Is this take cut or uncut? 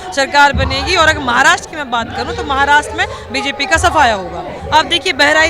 cut